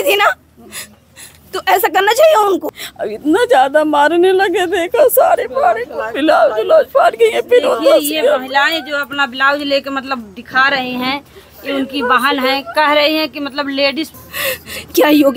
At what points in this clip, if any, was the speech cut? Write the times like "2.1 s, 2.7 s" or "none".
2.8 s, 14.1 s